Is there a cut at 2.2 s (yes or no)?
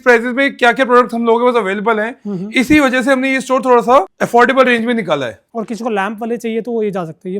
no